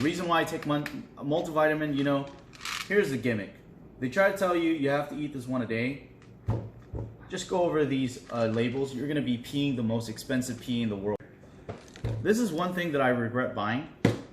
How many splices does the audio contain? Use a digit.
1